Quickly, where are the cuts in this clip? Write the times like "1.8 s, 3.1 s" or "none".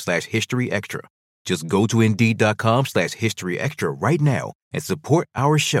none

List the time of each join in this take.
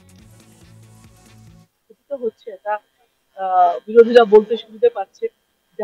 1.6 s

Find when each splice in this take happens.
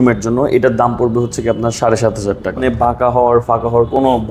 2.7 s

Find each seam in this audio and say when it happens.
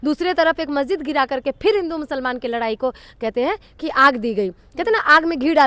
none

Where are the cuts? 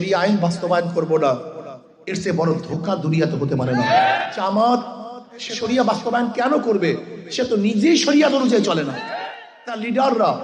4.2 s, 5.5 s, 9.1 s

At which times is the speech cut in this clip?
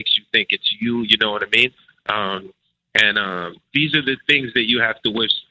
none

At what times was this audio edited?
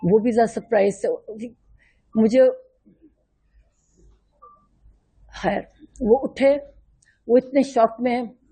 none

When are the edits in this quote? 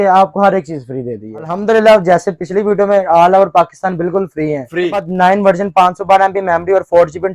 1.5 s, 5.1 s

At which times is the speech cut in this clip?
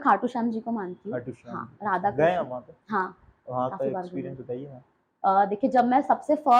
none

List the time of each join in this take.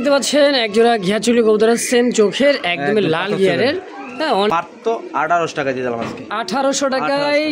4.5 s

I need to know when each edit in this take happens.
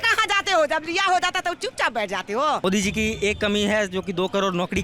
2.6 s

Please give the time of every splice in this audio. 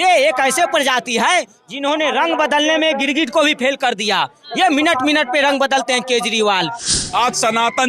6.9 s

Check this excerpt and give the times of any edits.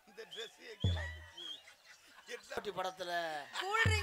2.6 s

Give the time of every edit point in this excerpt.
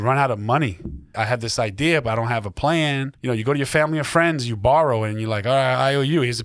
1.0 s, 3.1 s

